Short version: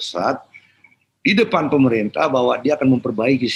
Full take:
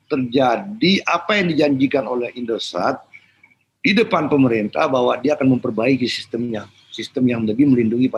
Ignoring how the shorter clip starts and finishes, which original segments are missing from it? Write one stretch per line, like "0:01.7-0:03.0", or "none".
none